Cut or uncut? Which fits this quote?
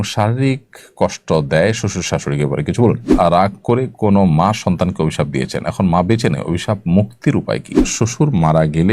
cut